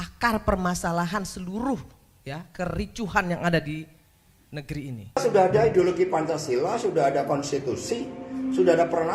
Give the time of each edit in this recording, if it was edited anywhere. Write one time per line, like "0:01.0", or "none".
0:05.2